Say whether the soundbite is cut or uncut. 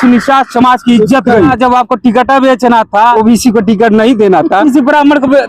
cut